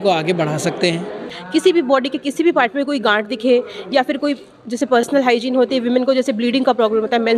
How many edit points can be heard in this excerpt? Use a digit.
1